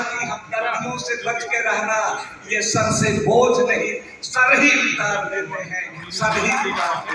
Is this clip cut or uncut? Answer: uncut